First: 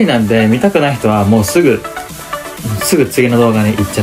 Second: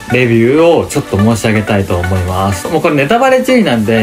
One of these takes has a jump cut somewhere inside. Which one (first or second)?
second